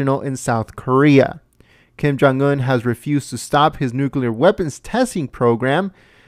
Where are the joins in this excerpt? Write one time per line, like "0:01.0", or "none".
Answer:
0:05.3